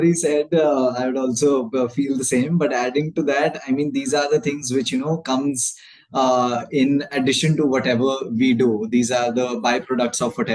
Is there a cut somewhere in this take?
no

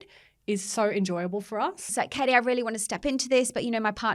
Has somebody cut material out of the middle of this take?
yes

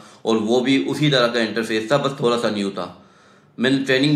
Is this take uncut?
yes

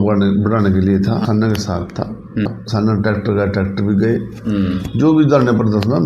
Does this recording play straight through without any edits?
no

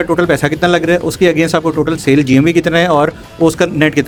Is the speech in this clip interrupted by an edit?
no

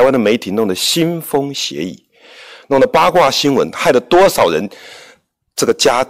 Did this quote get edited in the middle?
no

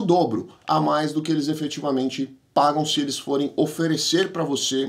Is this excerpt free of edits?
yes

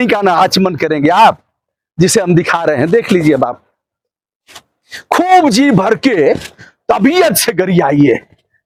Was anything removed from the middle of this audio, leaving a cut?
no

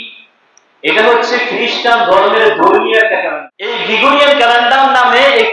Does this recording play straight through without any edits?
no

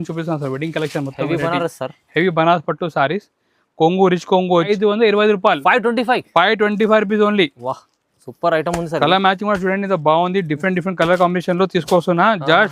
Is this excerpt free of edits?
no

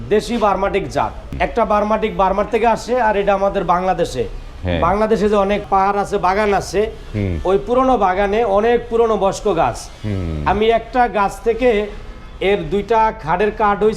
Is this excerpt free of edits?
no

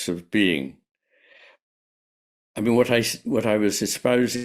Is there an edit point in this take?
no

